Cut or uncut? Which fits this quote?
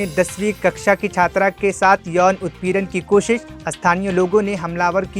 uncut